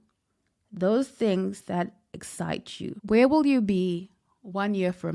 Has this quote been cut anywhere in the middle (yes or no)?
yes